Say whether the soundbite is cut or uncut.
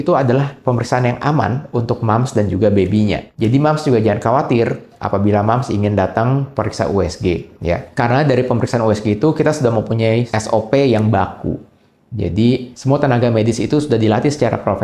uncut